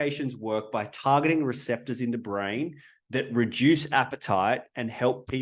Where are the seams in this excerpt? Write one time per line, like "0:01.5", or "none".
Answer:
none